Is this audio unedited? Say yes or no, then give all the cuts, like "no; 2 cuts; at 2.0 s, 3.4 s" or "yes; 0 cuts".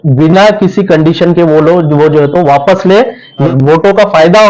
no; 1 cut; at 3.5 s